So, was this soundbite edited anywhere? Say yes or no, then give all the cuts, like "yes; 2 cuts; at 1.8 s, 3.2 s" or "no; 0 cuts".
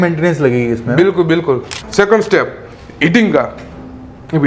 yes; 1 cut; at 1.8 s